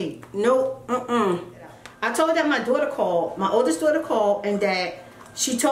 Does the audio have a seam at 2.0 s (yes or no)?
yes